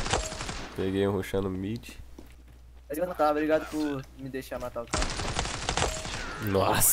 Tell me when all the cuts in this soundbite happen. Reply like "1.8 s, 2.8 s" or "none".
3.1 s